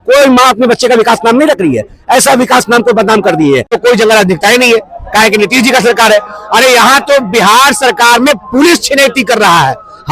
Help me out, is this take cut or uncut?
cut